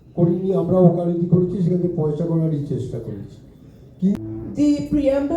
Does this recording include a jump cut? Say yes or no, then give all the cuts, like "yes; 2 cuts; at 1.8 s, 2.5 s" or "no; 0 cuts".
yes; 1 cut; at 4.2 s